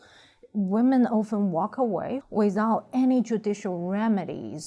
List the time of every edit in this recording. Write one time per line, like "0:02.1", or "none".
0:02.2